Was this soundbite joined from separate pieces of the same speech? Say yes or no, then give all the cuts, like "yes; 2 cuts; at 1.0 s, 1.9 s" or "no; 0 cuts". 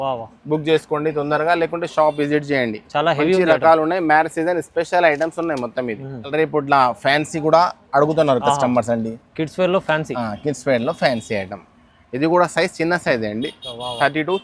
yes; 1 cut; at 6.3 s